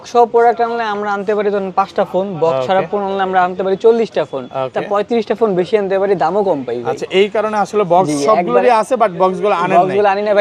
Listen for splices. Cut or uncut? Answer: uncut